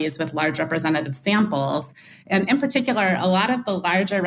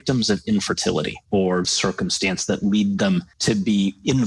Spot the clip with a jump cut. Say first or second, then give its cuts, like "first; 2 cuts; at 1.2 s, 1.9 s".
second; 2 cuts; at 1.6 s, 3.3 s